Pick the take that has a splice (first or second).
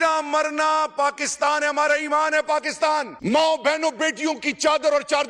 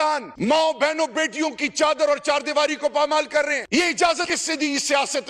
second